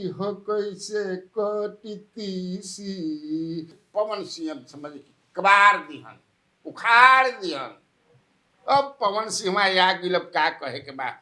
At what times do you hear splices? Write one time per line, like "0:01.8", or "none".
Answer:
0:03.8